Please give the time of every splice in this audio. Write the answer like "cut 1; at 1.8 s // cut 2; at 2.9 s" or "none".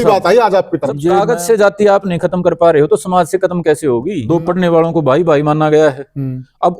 cut 1; at 1.1 s // cut 2; at 4.1 s